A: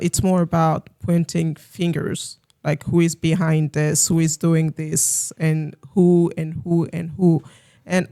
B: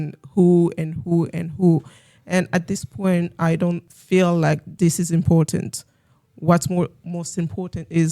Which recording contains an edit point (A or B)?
B